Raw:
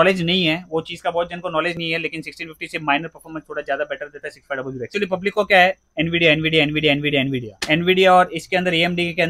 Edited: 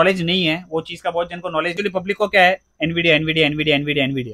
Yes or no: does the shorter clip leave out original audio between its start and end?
yes